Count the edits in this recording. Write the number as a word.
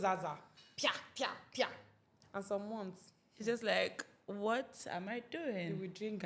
zero